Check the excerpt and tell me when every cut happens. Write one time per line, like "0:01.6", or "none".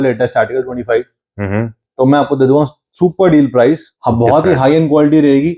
0:03.9